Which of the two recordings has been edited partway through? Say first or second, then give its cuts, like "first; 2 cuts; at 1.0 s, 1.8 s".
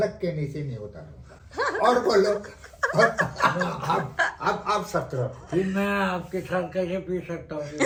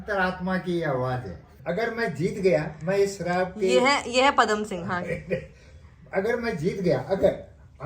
second; 1 cut; at 1.5 s